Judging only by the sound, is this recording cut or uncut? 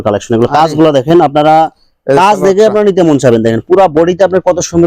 uncut